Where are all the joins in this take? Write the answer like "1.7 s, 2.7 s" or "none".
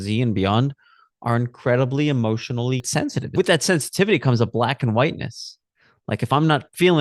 3.3 s